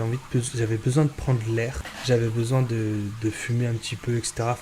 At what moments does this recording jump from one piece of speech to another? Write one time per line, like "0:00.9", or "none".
0:01.9

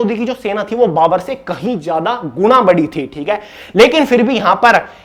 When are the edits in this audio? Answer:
none

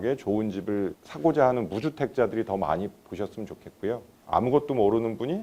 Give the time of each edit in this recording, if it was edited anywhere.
0:04.1

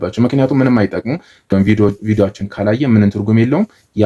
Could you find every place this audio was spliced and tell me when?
0:01.5

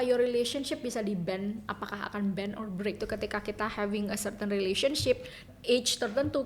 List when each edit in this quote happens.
0:03.0
0:05.5

